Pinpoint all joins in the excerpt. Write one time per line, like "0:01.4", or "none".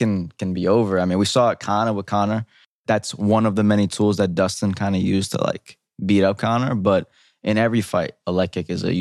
0:02.8